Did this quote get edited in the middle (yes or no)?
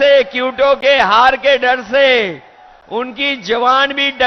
no